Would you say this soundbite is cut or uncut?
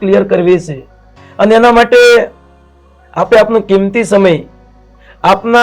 uncut